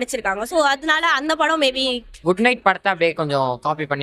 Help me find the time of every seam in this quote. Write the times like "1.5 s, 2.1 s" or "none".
2.1 s